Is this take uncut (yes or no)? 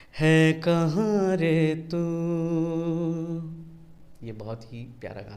yes